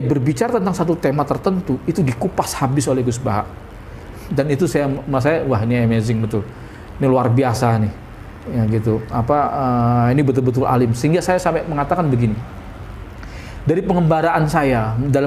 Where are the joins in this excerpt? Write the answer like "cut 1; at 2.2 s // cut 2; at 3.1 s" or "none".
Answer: none